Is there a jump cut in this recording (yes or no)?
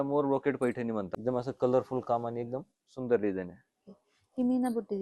yes